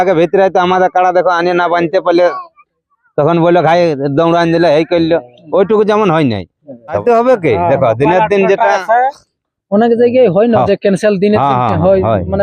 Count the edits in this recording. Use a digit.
1